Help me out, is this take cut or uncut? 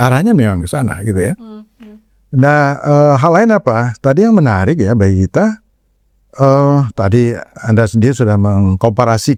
uncut